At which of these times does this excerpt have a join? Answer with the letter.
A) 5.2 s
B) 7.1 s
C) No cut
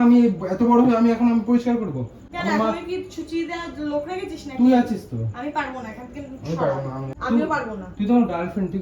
B